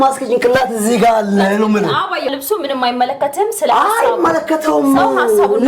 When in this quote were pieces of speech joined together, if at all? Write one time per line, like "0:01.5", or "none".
0:01.9